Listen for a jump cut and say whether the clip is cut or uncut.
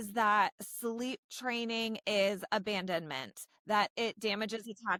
uncut